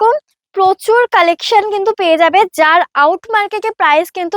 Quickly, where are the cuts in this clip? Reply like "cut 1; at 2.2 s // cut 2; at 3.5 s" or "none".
none